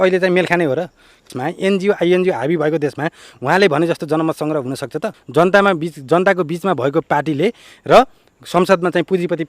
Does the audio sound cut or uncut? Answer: cut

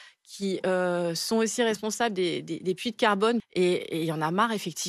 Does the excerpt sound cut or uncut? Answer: cut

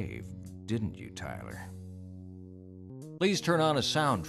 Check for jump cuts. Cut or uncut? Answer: cut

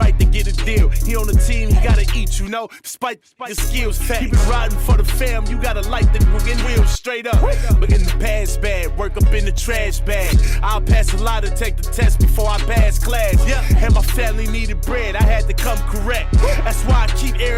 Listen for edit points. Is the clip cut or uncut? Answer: uncut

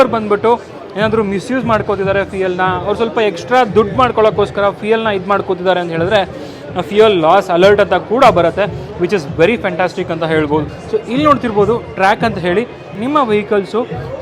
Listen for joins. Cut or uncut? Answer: cut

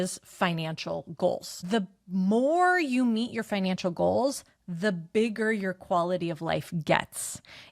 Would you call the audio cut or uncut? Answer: cut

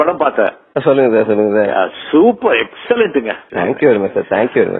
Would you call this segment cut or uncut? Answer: cut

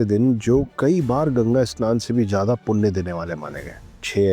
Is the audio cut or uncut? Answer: uncut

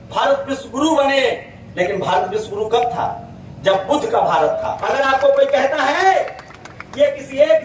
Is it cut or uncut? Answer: cut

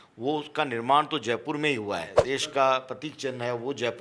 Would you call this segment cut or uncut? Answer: cut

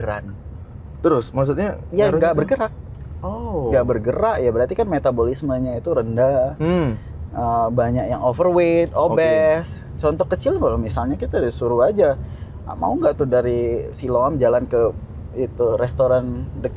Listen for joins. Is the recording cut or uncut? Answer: uncut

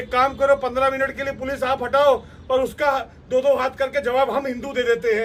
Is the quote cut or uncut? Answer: uncut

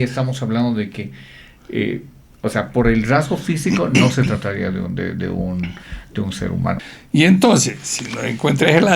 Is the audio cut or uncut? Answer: cut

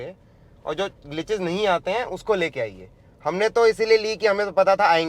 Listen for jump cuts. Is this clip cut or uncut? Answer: uncut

